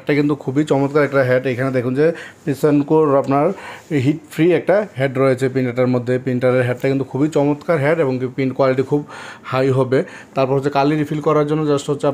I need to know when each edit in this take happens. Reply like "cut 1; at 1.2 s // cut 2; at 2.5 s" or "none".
none